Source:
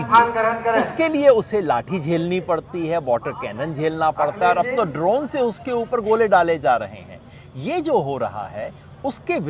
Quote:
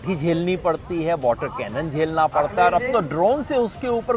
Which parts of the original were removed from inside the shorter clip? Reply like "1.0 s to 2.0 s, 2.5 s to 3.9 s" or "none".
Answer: none